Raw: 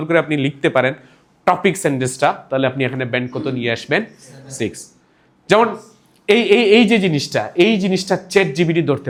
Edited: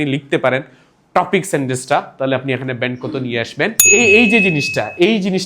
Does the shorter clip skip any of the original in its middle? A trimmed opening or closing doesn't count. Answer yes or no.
yes